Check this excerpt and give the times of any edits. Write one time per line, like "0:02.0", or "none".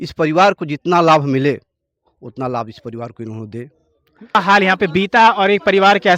0:04.3